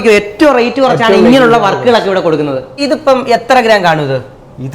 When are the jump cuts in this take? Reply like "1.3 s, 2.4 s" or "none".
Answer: 2.8 s